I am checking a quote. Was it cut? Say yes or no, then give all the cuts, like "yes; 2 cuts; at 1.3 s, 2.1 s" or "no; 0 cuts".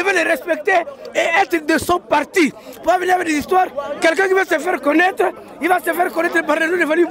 no; 0 cuts